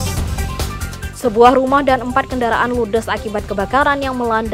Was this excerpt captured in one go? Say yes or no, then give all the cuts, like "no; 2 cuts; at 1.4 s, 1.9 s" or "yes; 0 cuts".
no; 1 cut; at 1.1 s